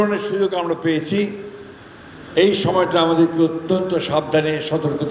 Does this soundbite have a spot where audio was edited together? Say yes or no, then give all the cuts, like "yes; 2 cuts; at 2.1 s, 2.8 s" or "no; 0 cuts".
no; 0 cuts